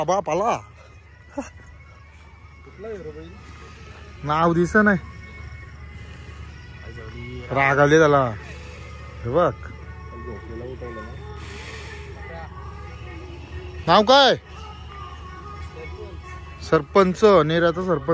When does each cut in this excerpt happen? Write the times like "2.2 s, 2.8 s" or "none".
none

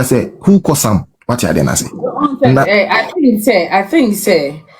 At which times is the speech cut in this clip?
1.1 s

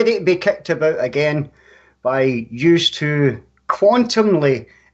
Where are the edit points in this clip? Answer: 1.1 s

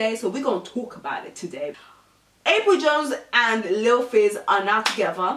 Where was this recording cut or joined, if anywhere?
1.7 s

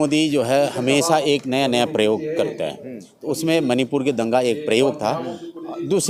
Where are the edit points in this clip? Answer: none

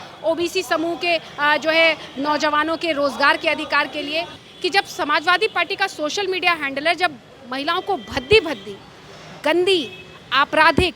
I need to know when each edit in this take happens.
4.4 s

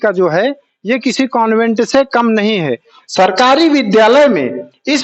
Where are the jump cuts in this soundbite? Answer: 3.0 s

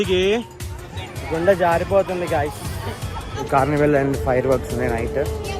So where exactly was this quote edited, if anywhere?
3.3 s

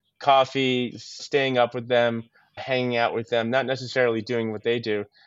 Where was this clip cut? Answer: 1.2 s, 2.6 s

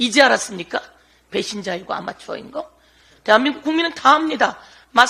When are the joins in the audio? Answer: none

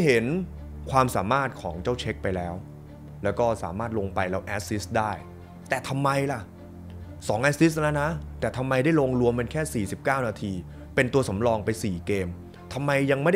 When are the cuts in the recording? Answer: none

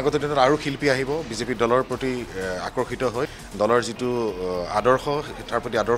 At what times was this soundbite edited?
3.4 s

